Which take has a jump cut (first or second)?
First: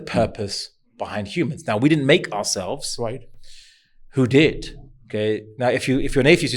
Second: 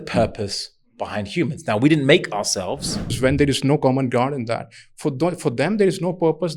second